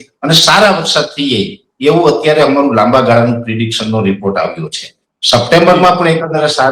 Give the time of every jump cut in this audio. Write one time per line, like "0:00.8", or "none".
none